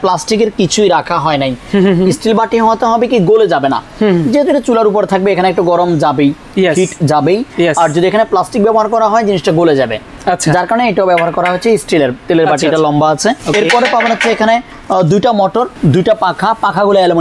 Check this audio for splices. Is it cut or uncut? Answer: uncut